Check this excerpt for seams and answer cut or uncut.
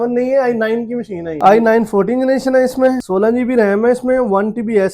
cut